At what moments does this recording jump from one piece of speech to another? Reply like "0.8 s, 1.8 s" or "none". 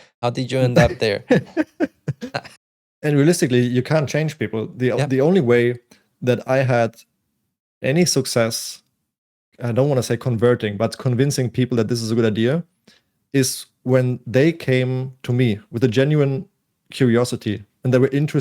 2.5 s